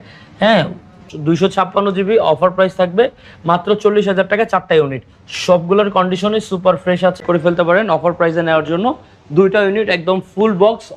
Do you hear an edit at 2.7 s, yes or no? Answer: no